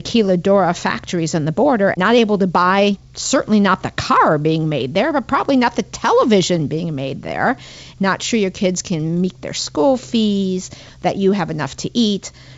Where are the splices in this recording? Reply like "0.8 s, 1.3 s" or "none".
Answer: 1.9 s, 3.1 s, 7.9 s